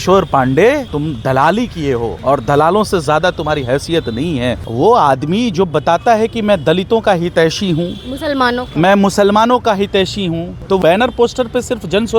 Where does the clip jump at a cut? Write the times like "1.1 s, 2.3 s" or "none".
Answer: 0.9 s, 2.1 s, 4.6 s, 10.8 s